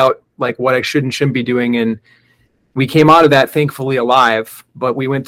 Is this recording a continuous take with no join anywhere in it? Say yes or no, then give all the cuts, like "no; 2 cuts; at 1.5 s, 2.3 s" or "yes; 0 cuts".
yes; 0 cuts